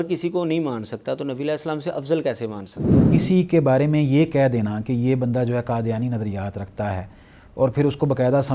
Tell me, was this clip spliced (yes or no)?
yes